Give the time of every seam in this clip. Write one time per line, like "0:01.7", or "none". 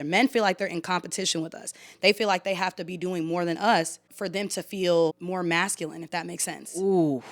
0:04.1
0:05.2